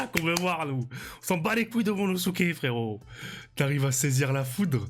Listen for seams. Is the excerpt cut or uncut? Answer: uncut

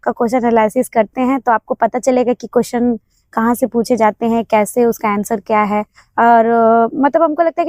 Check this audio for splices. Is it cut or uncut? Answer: uncut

